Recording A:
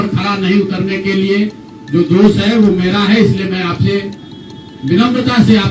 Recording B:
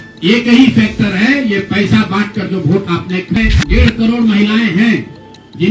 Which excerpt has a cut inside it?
B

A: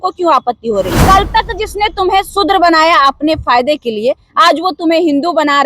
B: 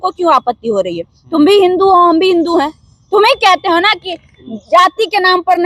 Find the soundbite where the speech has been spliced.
A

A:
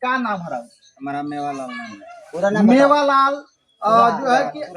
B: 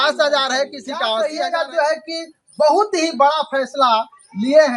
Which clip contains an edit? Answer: B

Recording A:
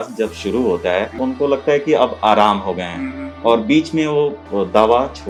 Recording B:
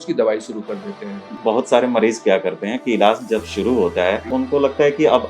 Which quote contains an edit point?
B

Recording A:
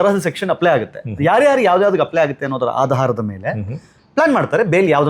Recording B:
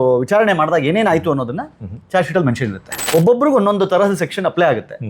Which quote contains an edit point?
B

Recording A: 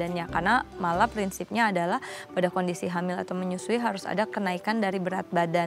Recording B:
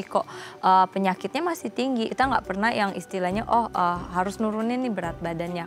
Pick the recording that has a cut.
B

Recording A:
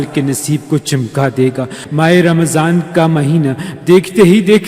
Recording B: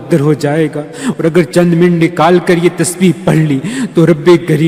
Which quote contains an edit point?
A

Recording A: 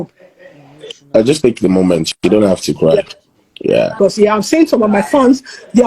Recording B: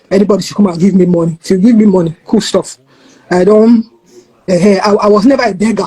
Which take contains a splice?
A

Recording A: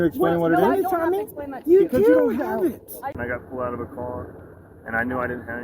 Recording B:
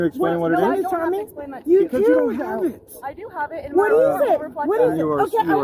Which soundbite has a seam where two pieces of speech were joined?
A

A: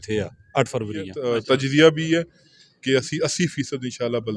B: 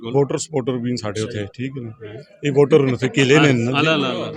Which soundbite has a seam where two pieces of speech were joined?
A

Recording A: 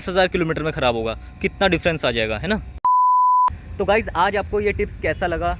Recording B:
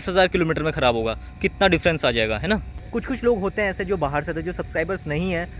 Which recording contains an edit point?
B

